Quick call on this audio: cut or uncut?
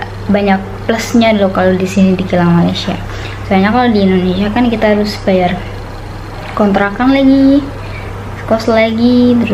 uncut